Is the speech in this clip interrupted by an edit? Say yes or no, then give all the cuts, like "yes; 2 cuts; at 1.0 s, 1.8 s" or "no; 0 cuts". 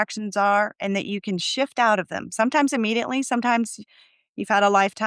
no; 0 cuts